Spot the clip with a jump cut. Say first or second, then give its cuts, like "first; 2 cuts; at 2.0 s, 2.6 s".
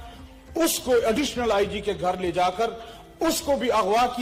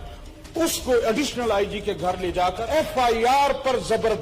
second; 1 cut; at 2.6 s